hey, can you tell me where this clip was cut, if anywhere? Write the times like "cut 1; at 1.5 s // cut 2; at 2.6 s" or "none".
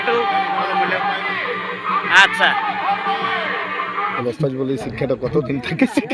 cut 1; at 4.1 s